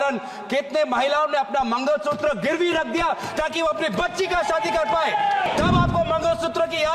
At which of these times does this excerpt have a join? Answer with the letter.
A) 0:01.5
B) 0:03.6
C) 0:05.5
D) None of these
C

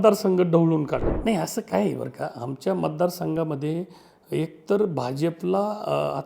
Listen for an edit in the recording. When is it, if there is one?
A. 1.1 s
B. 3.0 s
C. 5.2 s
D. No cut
A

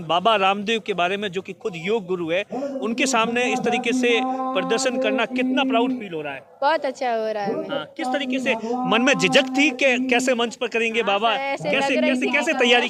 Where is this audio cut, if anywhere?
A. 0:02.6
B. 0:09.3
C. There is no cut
C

